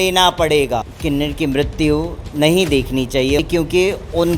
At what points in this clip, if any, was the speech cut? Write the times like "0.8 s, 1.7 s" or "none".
0.9 s, 3.4 s